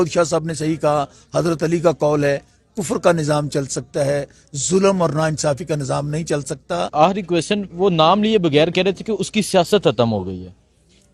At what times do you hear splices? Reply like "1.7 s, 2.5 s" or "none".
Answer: 6.9 s